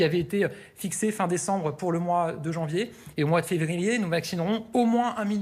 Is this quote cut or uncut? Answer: cut